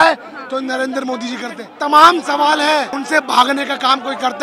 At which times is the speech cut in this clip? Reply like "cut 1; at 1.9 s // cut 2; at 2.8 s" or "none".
cut 1; at 1.7 s // cut 2; at 3.0 s